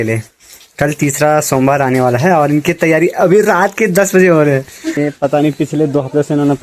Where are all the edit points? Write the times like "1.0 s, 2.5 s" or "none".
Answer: 5.0 s